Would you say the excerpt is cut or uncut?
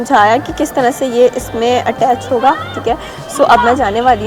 uncut